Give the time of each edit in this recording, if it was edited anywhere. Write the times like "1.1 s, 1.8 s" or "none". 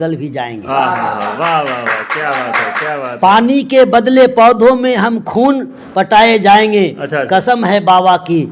none

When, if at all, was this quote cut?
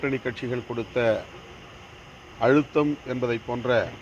none

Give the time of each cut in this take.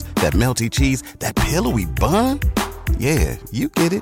none

